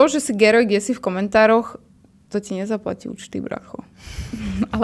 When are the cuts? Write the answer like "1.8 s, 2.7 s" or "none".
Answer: none